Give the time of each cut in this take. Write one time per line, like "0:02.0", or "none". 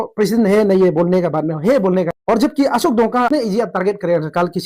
0:02.2
0:03.3

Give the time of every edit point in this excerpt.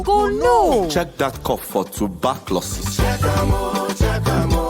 0:00.9

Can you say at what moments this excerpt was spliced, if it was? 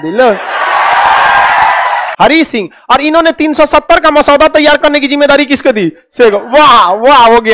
0:02.1

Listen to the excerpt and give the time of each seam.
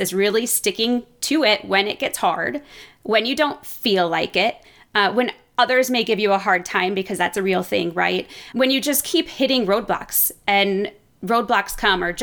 none

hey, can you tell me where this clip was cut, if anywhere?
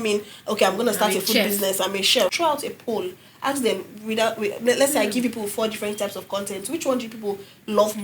0:02.3

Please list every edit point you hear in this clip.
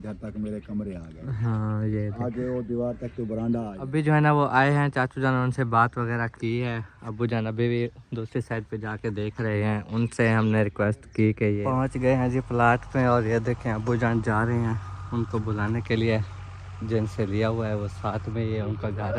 0:03.8
0:11.6

